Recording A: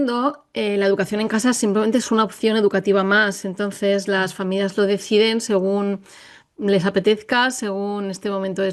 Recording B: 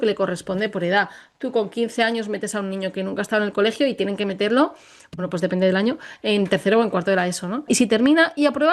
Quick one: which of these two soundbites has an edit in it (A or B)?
B